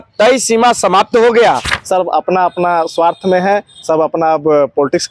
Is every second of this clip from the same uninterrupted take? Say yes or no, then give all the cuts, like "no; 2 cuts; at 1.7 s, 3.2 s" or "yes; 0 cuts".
no; 1 cut; at 1.7 s